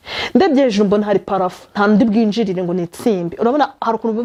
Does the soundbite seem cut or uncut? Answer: uncut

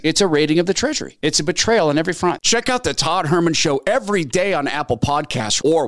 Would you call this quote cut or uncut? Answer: cut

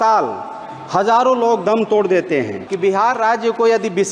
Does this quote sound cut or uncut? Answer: cut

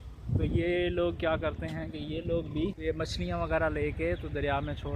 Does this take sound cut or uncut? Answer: cut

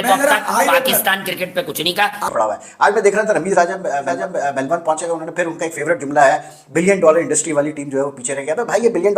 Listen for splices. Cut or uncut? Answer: cut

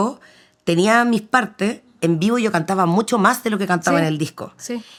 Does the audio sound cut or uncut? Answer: uncut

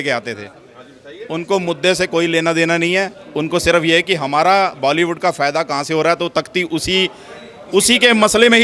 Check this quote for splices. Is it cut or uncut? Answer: uncut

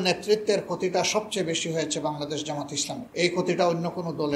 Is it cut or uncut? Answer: cut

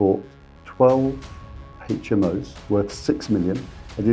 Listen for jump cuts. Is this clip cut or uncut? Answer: cut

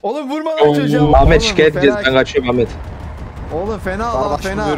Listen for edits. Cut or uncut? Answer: cut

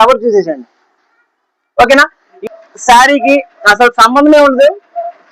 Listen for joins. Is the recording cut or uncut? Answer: cut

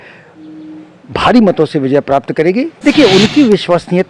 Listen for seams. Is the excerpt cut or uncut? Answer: cut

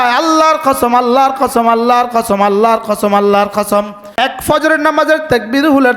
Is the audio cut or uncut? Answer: cut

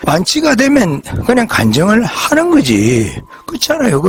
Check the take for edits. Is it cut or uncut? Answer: uncut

